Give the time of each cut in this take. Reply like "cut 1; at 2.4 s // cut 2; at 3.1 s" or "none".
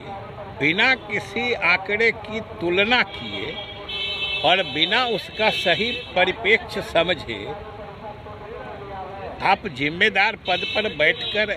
none